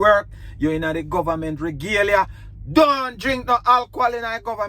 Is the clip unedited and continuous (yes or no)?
yes